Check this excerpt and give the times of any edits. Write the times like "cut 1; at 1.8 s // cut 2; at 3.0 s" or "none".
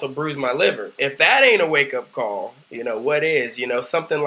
cut 1; at 1.0 s